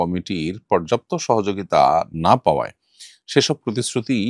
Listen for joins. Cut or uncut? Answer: uncut